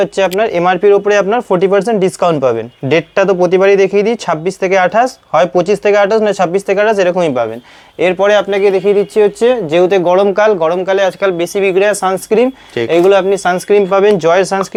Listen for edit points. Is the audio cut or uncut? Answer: uncut